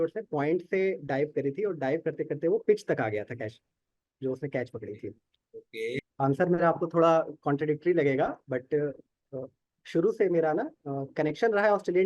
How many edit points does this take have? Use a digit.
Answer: 1